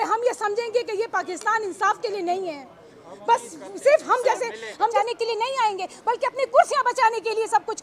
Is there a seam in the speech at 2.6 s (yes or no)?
no